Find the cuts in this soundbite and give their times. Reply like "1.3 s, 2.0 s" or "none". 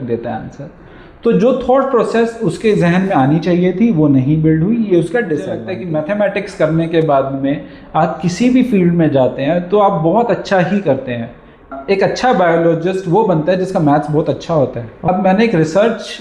5.7 s, 11.8 s, 14.9 s